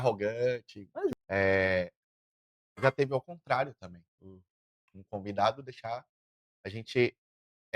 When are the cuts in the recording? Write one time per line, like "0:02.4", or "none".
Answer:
0:01.1